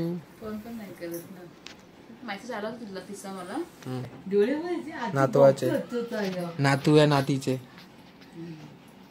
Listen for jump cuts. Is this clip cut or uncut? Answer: cut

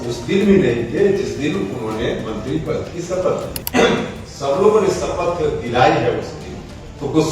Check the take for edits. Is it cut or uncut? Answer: cut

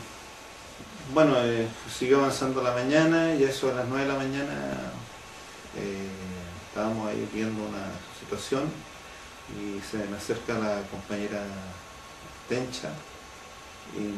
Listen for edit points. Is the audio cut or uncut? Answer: cut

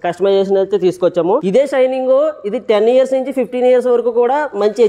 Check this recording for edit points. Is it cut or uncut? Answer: cut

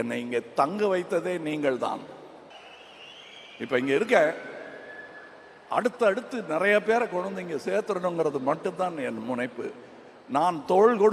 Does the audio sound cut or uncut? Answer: uncut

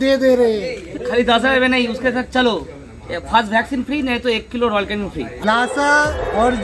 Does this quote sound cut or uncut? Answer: cut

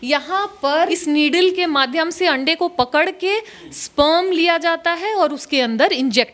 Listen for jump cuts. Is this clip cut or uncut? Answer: cut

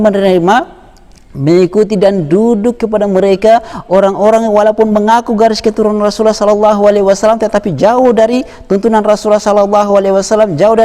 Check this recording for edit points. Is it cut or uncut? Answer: uncut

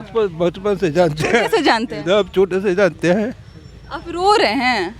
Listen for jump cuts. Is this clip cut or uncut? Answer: uncut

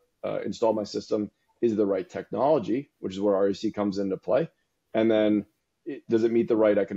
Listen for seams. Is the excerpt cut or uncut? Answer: uncut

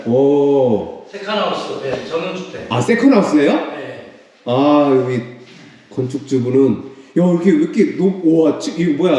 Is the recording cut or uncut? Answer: uncut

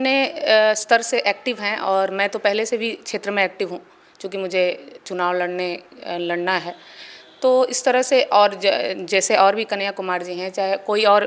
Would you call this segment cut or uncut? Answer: uncut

